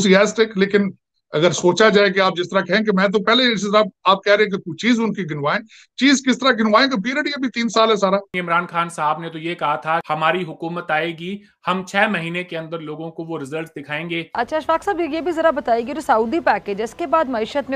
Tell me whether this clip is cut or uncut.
cut